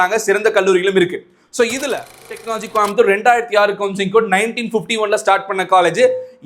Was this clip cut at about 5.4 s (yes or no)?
no